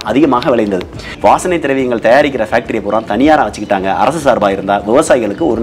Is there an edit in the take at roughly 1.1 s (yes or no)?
yes